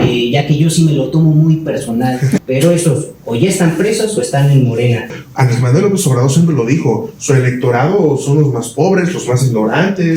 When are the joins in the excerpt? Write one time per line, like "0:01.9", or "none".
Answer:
0:02.4
0:05.2